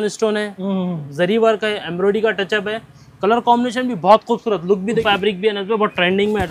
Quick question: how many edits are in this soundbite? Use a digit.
1